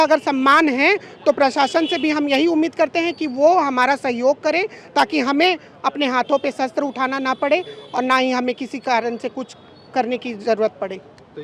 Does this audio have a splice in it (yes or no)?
no